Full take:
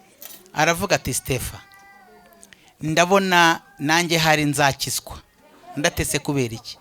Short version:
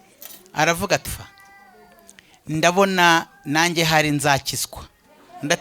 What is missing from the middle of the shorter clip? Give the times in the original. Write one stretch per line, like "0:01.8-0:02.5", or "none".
0:01.1-0:01.4